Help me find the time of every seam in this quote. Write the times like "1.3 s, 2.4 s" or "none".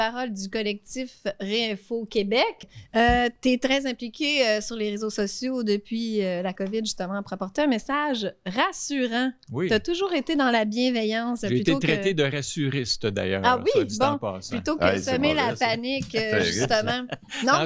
2.6 s